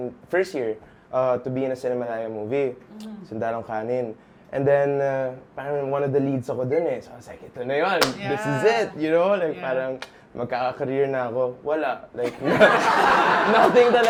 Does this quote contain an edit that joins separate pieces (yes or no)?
no